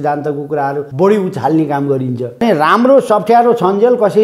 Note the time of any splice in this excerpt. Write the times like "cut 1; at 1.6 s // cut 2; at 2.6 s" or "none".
cut 1; at 0.9 s // cut 2; at 2.4 s